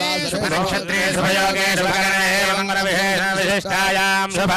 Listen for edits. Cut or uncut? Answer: uncut